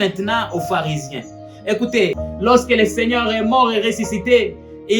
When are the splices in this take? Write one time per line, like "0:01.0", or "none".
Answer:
0:02.3